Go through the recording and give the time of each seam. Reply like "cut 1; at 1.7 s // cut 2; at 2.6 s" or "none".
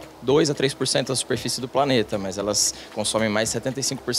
none